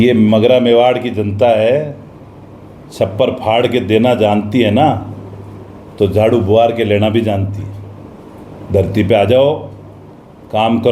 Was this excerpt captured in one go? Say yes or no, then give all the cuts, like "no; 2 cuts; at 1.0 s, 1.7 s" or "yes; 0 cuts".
yes; 0 cuts